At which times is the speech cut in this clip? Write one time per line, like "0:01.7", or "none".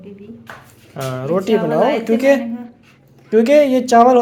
none